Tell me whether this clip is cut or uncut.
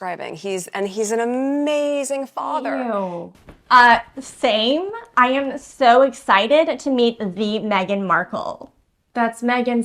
cut